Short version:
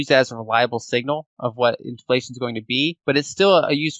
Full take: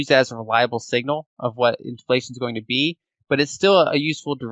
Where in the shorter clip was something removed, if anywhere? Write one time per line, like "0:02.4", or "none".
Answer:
0:03.0